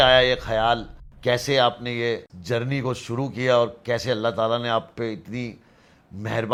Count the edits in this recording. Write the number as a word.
zero